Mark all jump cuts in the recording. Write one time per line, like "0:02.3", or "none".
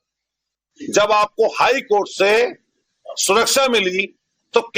none